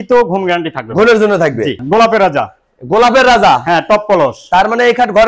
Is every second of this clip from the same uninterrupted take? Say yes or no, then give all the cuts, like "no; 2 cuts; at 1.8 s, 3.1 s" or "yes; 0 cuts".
no; 1 cut; at 1.8 s